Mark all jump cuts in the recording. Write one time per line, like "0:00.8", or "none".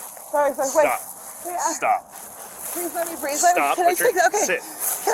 none